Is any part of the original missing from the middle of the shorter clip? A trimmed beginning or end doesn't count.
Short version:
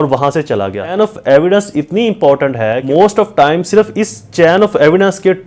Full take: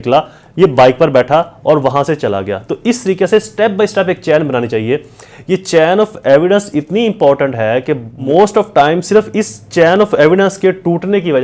yes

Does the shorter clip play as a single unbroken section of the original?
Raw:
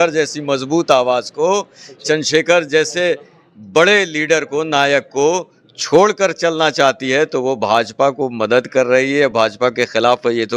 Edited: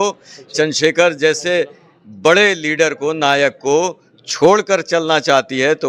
yes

